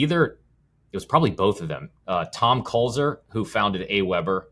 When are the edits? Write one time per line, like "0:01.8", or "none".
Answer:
none